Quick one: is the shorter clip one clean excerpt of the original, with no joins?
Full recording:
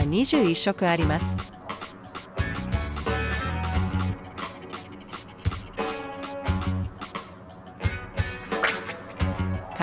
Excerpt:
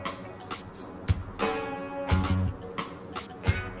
yes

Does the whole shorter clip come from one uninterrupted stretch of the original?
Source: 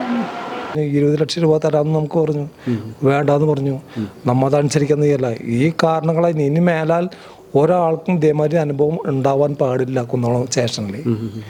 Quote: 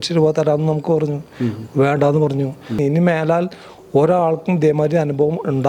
no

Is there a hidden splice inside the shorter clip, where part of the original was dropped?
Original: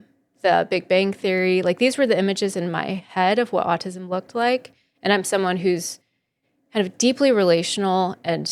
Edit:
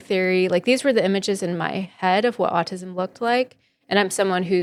no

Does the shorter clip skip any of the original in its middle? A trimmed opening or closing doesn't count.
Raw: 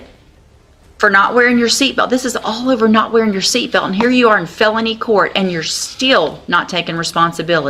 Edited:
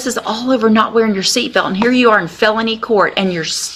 no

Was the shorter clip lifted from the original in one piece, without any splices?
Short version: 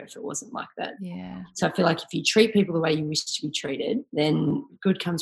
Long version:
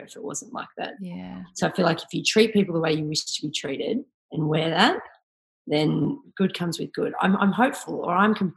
no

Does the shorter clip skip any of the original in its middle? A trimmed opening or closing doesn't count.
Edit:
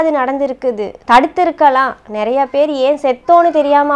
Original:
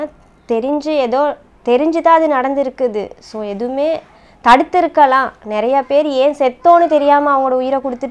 yes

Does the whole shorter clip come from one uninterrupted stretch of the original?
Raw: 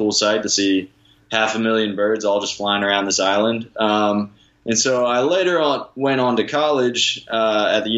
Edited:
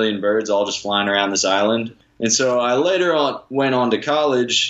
no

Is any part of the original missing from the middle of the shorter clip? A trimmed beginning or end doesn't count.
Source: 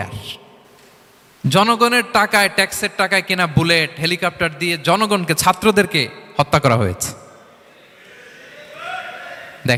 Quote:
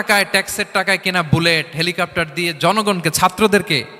no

